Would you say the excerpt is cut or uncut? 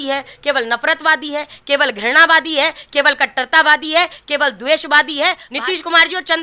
cut